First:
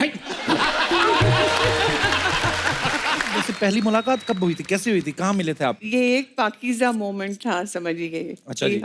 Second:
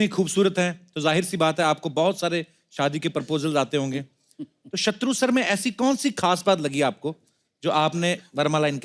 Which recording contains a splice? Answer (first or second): first